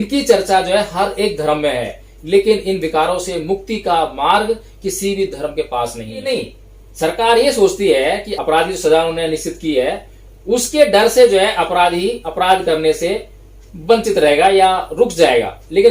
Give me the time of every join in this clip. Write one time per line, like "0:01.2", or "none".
0:06.2
0:08.3